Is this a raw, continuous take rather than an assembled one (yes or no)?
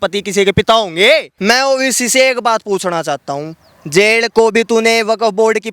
no